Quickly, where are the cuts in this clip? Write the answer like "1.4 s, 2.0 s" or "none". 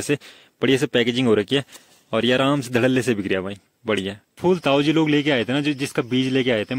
4.4 s